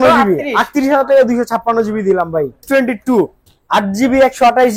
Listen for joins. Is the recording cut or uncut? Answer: cut